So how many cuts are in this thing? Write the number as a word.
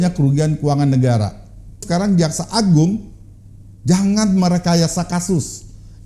one